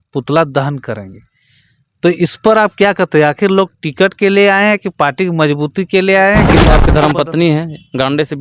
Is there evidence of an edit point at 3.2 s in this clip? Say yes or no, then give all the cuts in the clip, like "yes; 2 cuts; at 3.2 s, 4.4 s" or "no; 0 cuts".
no; 1 cut; at 6.6 s